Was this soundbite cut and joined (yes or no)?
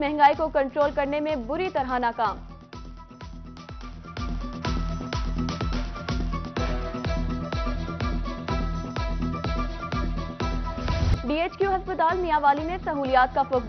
yes